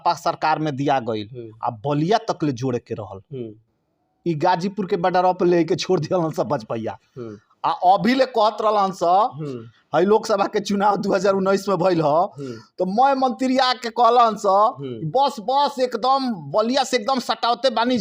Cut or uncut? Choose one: uncut